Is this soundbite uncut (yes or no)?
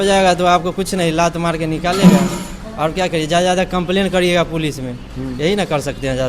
yes